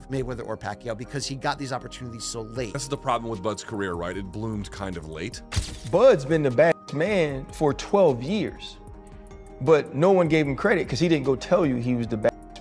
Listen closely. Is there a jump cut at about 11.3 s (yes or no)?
no